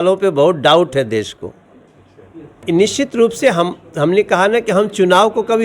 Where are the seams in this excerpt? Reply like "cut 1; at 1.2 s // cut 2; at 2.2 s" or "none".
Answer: cut 1; at 2.5 s